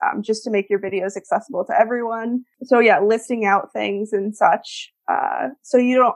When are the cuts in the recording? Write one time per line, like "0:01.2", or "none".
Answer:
0:02.5

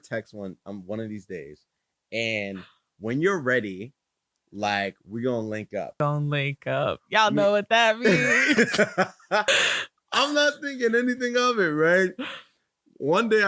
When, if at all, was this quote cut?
0:06.0
0:09.5

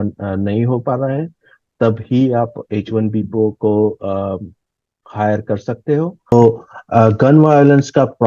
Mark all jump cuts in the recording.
0:06.3

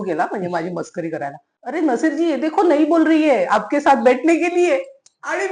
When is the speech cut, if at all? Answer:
0:01.5

